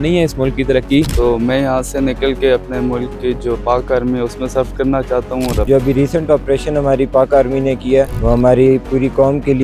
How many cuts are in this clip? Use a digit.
3